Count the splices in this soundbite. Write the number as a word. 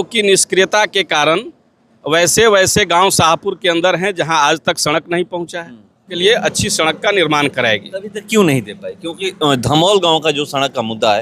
one